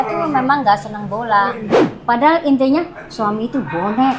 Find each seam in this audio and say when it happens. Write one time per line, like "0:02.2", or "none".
0:01.7